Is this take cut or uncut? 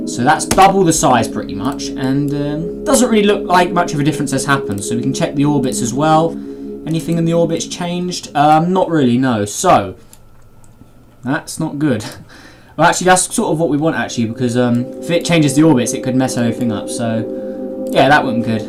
uncut